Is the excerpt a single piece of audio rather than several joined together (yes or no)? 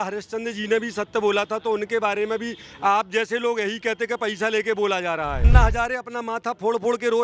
no